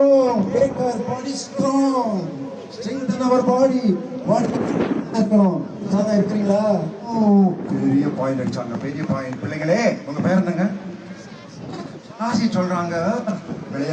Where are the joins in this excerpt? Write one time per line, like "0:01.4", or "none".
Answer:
0:07.0